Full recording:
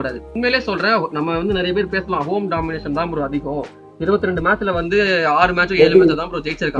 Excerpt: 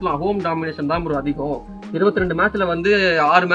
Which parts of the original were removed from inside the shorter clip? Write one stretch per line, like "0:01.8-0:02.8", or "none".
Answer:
none